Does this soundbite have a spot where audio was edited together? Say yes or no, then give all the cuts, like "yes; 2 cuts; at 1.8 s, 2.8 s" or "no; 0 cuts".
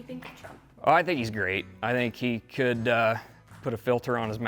no; 0 cuts